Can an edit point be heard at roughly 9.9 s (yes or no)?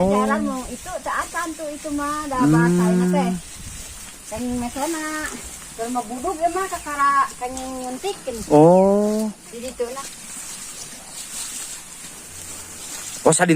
yes